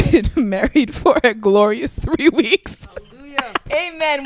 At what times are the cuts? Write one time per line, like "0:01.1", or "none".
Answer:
none